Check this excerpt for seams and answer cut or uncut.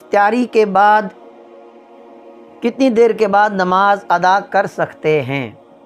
uncut